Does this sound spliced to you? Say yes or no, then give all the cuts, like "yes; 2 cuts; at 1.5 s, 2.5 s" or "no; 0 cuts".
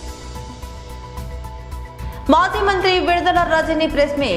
no; 0 cuts